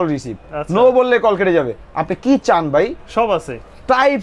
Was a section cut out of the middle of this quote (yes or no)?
no